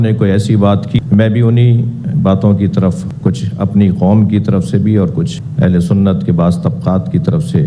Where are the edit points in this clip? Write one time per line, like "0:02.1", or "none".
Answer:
0:01.0